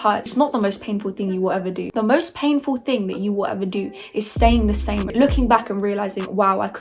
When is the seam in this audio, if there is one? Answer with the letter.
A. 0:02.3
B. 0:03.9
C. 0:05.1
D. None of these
C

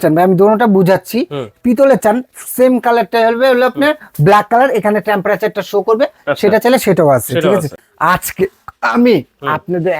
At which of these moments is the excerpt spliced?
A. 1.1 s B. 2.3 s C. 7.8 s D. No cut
C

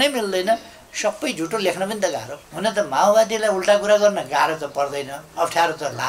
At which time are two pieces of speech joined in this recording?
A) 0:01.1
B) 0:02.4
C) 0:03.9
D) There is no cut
B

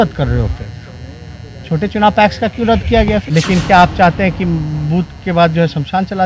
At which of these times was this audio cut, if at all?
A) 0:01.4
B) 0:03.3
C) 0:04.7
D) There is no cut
B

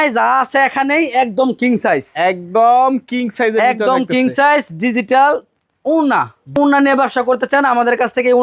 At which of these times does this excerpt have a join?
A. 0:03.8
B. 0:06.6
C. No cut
B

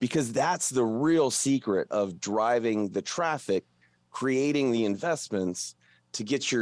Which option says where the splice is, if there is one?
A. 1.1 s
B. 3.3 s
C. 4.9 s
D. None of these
D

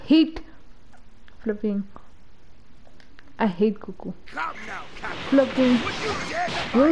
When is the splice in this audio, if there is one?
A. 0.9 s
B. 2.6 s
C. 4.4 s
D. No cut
D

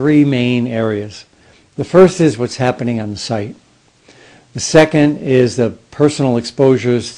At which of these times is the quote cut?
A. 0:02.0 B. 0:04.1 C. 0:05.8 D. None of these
A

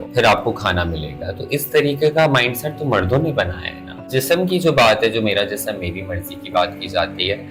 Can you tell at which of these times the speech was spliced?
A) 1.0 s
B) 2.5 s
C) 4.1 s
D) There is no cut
C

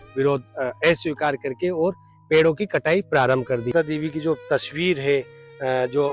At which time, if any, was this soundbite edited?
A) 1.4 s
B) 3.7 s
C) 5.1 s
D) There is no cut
B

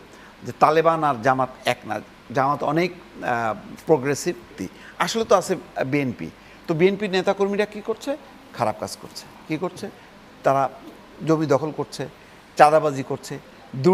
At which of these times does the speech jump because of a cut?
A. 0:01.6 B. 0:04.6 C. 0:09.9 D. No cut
B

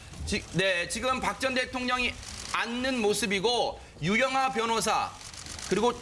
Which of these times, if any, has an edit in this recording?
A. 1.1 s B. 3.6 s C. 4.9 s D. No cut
A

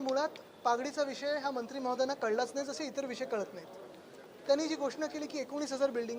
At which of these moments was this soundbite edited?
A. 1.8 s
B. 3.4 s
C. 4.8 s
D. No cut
A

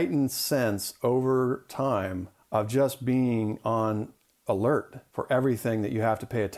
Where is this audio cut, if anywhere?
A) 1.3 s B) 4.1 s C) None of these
C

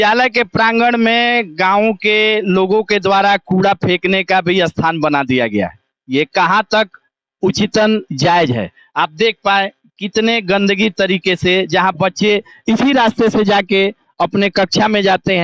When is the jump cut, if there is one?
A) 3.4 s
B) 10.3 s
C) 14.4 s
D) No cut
D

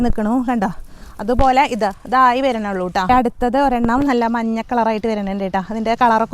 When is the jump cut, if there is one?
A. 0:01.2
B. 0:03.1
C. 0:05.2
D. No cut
B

